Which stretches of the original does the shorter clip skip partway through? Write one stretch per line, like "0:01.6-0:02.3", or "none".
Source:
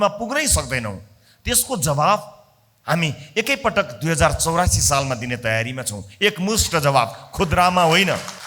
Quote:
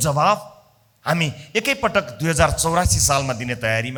none